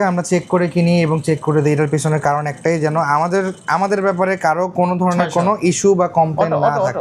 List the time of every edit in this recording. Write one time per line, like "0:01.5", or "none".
none